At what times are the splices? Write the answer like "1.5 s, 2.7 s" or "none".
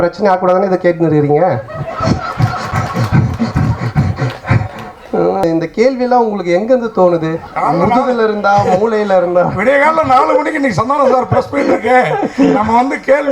5.4 s